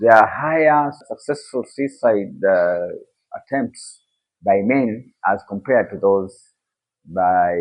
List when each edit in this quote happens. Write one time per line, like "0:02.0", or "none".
0:01.0